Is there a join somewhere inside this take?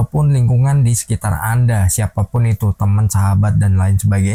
no; 0 cuts

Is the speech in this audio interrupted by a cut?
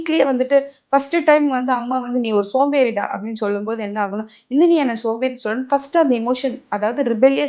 no; 0 cuts

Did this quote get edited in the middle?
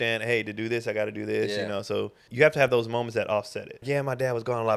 yes; 2 cuts; at 2.2 s, 3.8 s

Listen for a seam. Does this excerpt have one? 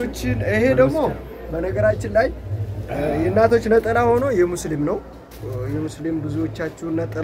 no; 0 cuts

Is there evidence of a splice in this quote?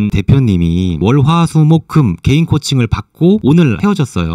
no; 0 cuts

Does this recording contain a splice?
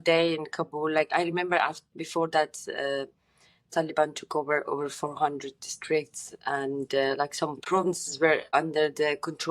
yes; 2 cuts; at 7.6 s, 8.5 s

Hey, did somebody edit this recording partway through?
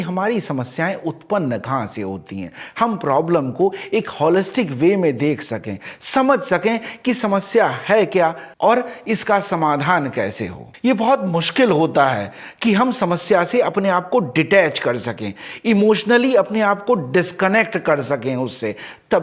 no; 0 cuts

